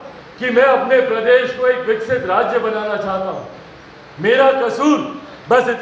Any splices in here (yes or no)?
no